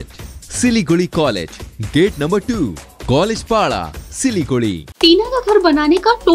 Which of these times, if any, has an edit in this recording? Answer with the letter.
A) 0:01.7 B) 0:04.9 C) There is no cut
B